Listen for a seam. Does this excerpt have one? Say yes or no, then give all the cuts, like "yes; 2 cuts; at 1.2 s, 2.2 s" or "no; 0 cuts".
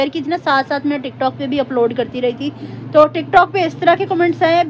no; 0 cuts